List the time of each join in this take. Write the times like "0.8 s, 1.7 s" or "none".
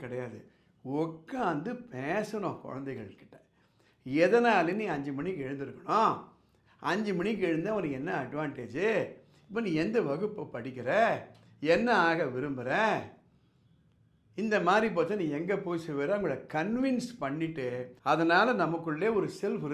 17.9 s